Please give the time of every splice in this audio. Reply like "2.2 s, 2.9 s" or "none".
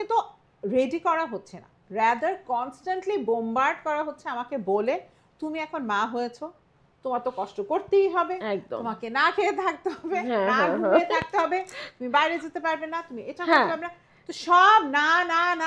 none